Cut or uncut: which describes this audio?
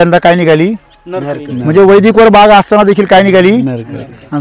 uncut